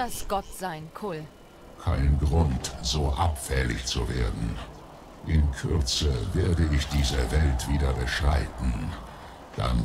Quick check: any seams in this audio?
yes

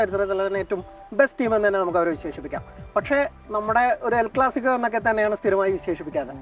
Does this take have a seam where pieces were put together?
no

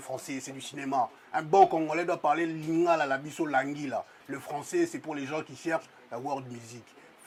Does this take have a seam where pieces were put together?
no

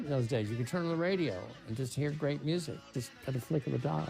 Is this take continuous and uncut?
no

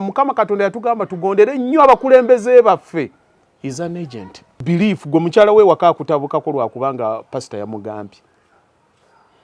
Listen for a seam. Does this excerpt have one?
yes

